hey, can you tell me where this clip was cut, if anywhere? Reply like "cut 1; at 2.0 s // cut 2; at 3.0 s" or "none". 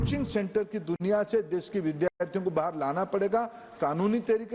none